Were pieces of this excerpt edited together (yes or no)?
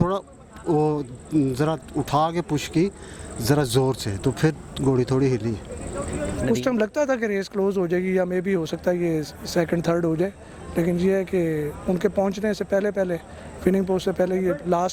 yes